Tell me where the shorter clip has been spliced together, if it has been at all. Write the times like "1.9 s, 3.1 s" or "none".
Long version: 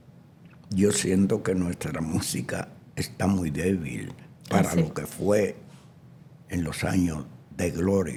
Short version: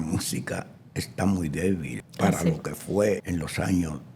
2.0 s, 3.2 s